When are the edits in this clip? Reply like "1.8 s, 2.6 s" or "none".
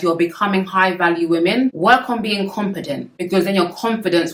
none